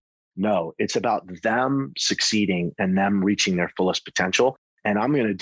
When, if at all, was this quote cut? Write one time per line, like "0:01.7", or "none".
none